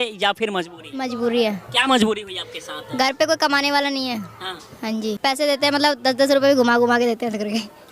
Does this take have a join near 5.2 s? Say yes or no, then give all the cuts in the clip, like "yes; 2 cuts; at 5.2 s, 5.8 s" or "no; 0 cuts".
yes; 1 cut; at 5.2 s